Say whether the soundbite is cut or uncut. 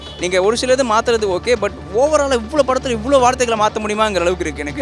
uncut